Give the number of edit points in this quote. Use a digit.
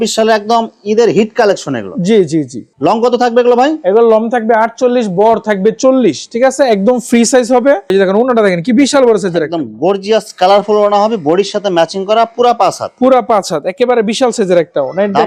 0